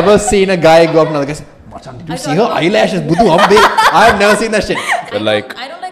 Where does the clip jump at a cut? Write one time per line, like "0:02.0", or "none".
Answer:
0:05.0

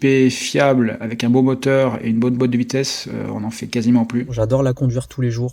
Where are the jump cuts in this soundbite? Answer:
0:04.3

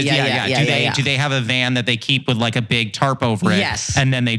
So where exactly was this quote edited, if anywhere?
none

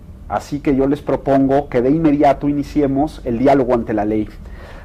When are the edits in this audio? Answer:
none

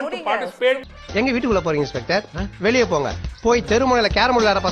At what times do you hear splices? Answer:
0:00.9

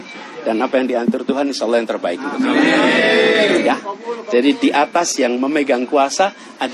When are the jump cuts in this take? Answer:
none

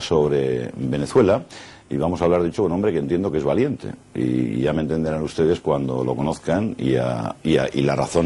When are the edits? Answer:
0:07.1

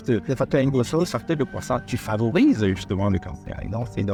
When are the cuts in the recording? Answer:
none

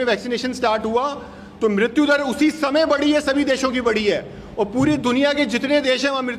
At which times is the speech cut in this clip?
none

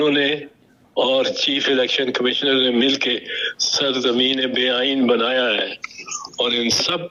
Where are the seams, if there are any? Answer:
none

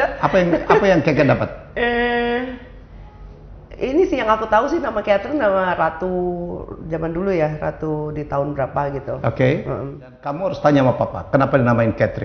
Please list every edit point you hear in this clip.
0:10.4

